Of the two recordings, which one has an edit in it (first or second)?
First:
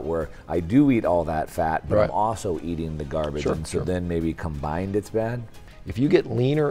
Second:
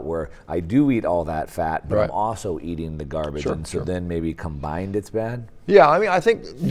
first